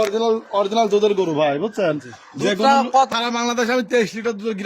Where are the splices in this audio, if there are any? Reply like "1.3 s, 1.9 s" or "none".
3.1 s